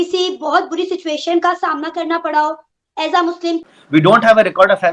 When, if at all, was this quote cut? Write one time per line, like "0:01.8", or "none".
0:03.6